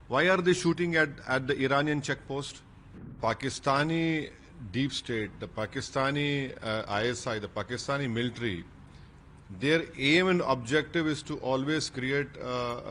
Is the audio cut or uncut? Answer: cut